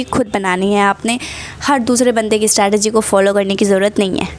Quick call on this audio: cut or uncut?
uncut